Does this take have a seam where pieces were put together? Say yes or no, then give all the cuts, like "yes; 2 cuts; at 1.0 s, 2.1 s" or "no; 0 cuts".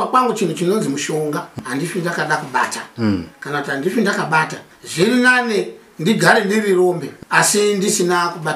yes; 3 cuts; at 1.6 s, 4.6 s, 7.1 s